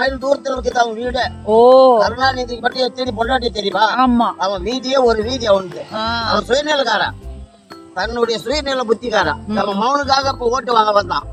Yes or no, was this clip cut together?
no